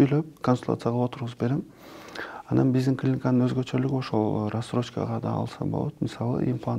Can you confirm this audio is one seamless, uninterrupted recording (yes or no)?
yes